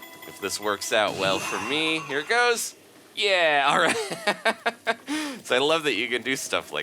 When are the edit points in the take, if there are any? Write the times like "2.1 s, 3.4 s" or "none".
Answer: none